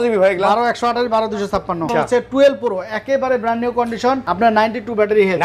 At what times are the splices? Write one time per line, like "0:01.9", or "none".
0:01.9
0:04.3